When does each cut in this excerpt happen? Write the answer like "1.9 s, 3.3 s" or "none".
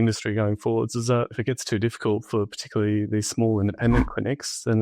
1.3 s